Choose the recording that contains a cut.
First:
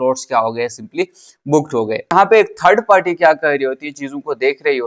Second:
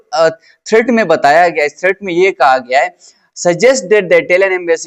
first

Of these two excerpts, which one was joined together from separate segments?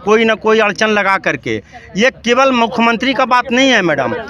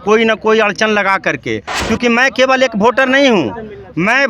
second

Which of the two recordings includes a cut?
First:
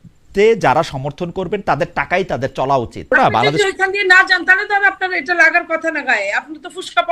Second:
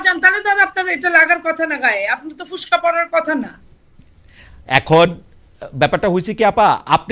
first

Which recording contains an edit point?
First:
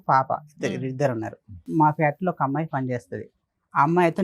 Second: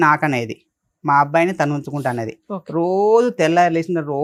first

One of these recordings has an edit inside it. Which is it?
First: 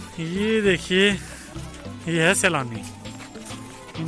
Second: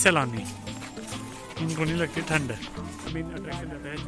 second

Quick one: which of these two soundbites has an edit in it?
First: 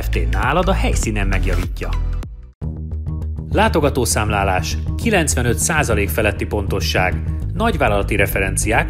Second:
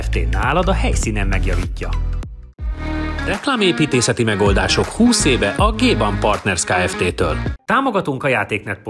second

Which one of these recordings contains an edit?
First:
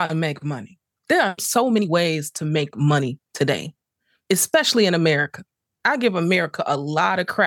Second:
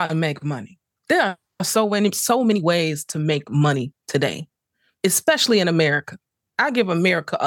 first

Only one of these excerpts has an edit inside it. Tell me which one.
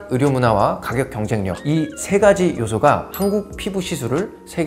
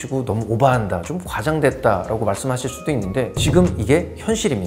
second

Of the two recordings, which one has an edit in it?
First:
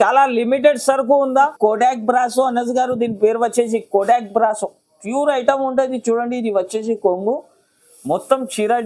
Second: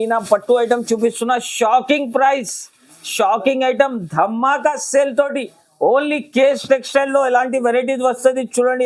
first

